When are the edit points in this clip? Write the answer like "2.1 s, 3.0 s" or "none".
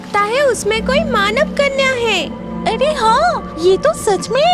3.5 s

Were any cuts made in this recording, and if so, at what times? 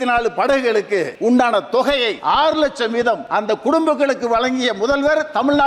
1.1 s, 2.2 s, 3.2 s

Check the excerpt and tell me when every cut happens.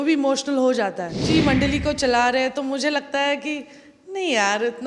1.2 s

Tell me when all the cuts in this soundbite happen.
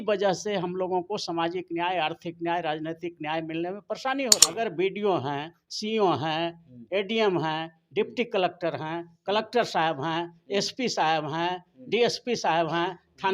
4.4 s

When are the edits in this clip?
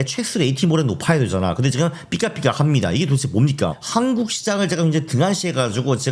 3.7 s

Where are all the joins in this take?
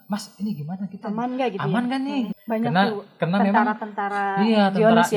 2.4 s

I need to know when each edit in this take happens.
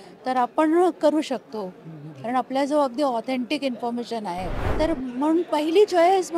4.6 s

